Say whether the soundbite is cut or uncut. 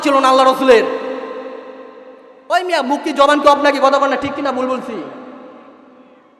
uncut